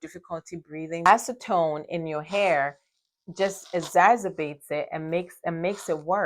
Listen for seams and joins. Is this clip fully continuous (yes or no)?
no